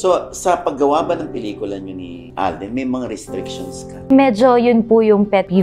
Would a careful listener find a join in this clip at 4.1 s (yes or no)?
yes